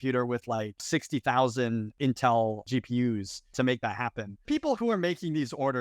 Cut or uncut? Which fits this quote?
cut